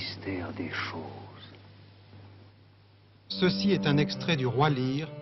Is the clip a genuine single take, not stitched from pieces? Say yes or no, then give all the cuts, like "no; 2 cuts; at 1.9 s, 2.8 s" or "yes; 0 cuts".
yes; 0 cuts